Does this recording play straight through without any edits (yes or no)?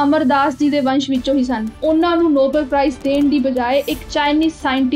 no